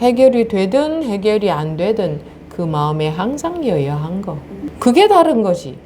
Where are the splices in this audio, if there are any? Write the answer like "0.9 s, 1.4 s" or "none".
4.6 s